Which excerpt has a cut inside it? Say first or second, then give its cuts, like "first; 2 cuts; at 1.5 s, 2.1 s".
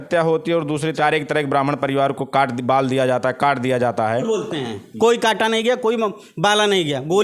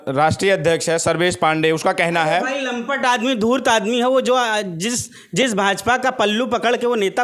first; 2 cuts; at 0.9 s, 4.2 s